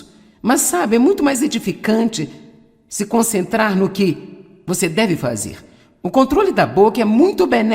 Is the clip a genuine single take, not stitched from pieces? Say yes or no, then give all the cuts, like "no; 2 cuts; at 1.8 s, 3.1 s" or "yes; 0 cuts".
no; 1 cut; at 6.8 s